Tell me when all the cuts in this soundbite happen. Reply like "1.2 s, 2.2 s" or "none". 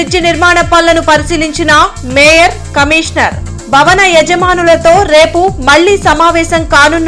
none